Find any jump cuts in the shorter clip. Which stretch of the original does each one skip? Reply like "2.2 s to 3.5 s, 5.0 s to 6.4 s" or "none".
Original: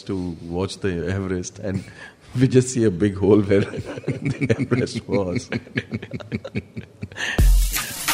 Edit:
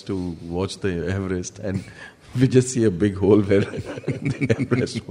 none

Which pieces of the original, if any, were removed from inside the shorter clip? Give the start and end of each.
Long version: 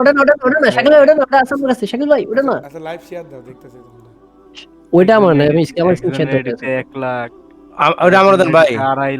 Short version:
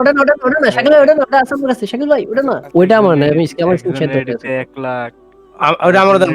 2.6 s to 4.8 s

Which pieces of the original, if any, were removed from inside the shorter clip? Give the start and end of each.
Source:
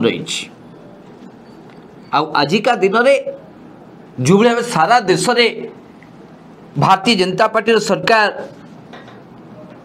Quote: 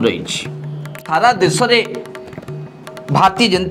1.0 s to 4.7 s

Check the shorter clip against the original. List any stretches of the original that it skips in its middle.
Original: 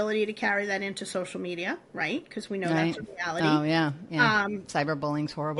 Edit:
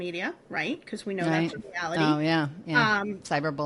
none

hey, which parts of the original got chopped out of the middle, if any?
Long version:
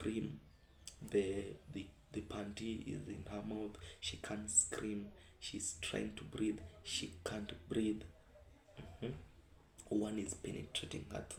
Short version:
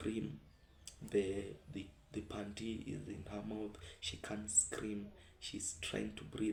none

